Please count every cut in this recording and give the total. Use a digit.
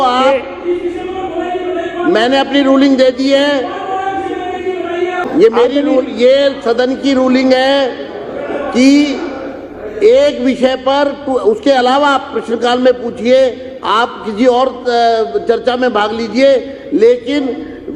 1